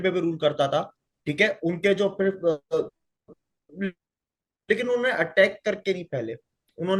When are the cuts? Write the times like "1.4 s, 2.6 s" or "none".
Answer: none